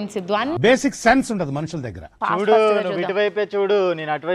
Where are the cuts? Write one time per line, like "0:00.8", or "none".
0:02.1